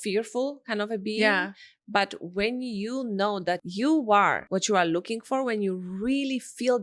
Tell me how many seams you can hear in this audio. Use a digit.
2